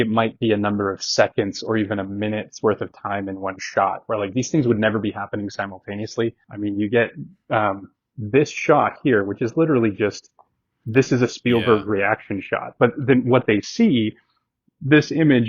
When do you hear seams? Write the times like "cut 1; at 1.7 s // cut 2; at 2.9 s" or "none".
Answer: cut 1; at 6.5 s // cut 2; at 12.7 s